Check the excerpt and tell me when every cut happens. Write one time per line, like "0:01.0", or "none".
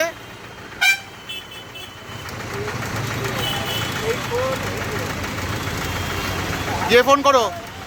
none

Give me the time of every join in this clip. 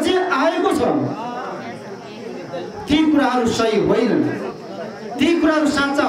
none

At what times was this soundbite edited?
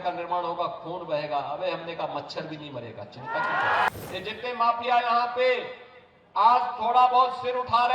0:03.9

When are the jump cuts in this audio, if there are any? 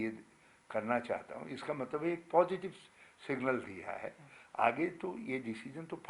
none

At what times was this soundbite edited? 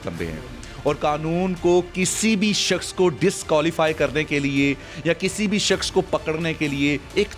none

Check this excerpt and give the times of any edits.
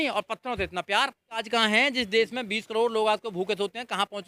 0:01.4

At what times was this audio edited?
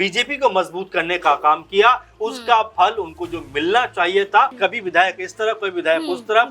0:04.5

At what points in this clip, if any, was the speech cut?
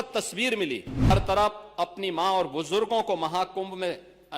0:01.1

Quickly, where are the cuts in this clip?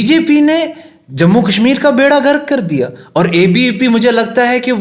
none

